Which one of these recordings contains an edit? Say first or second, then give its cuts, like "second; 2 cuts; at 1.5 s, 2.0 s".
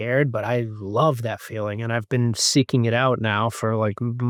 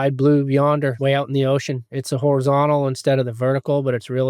second; 1 cut; at 1.0 s